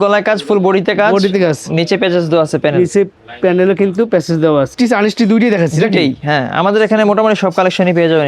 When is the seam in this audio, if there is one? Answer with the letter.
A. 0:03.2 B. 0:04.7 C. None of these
B